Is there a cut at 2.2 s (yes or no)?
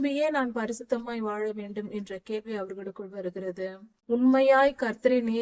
no